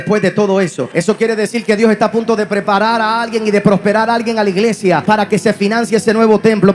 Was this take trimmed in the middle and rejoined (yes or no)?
yes